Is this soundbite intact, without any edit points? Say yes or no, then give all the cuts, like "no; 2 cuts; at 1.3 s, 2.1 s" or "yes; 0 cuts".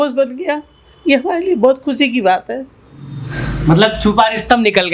yes; 0 cuts